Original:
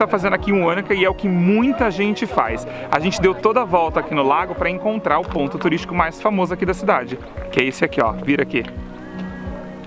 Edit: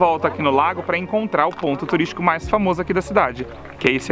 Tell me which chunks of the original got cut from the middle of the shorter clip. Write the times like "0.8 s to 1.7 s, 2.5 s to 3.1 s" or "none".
none